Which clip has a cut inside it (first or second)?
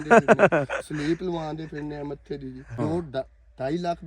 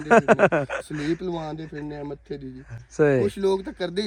first